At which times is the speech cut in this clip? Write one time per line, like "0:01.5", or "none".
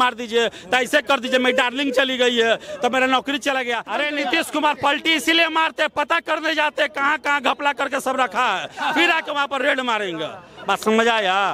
0:03.9